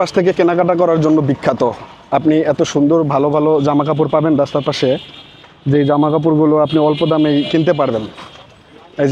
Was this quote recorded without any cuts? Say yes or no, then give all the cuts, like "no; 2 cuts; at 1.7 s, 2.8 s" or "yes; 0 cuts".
yes; 0 cuts